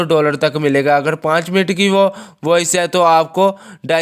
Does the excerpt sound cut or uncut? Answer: uncut